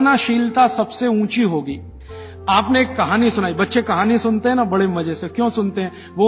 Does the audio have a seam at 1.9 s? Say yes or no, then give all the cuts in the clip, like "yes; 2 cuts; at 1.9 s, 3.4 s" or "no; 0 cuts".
yes; 1 cut; at 1.9 s